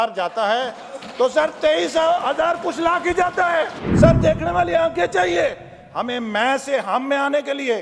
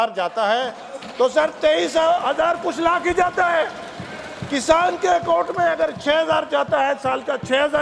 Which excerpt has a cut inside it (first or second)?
first